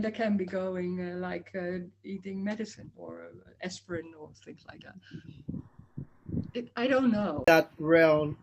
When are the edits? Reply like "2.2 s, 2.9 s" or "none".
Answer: 7.4 s